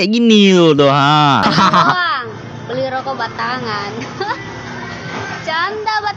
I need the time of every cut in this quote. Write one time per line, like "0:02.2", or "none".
0:01.4

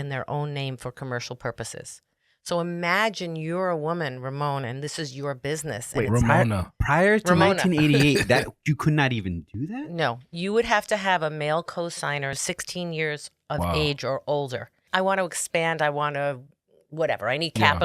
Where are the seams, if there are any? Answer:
0:12.4
0:14.8

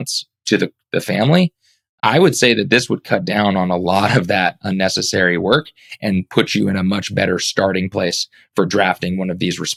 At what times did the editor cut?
none

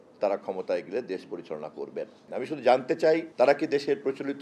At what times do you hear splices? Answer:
0:02.2
0:03.3

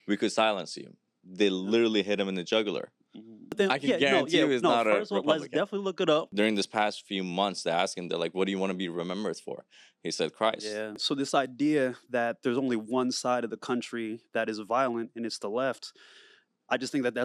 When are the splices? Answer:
0:03.6
0:06.3
0:11.0

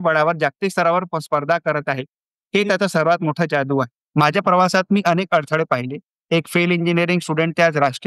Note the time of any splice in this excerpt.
0:04.0

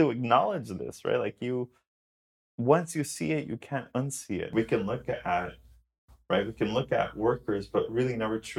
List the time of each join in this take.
0:04.5

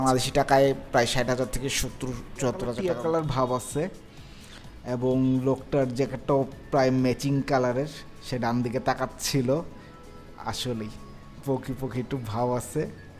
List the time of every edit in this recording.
0:02.8

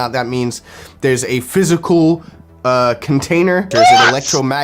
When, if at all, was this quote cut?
0:03.7

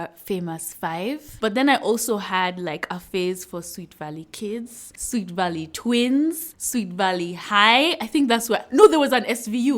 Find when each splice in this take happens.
0:01.4

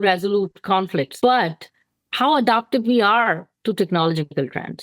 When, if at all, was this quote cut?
0:01.1

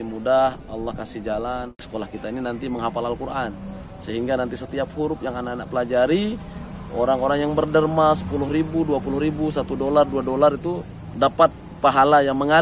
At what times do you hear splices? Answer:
0:01.8

